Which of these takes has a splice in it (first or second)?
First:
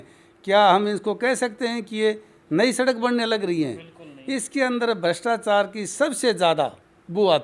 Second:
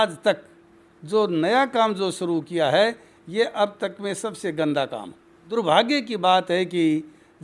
second